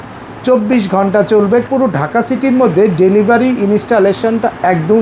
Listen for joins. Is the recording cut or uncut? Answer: cut